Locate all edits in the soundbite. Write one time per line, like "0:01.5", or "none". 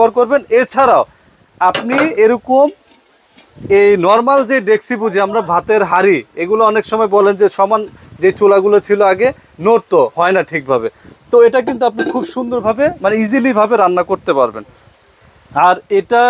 none